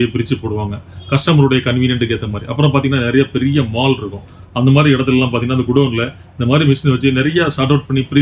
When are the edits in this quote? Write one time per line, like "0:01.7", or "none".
none